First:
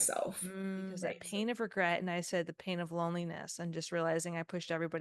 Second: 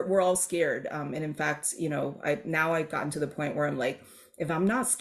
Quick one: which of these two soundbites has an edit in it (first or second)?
first